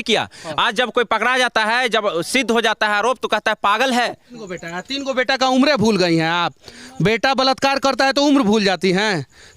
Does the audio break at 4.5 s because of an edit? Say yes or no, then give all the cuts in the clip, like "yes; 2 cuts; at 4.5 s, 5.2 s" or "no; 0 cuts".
yes; 1 cut; at 4.5 s